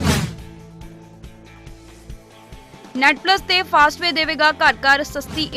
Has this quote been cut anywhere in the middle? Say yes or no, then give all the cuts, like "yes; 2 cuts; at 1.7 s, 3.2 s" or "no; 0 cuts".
yes; 1 cut; at 2.5 s